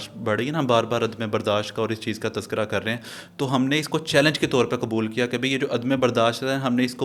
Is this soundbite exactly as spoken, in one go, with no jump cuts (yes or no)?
yes